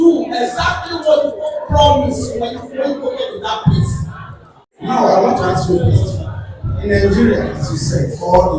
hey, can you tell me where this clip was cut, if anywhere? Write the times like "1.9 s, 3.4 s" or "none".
4.3 s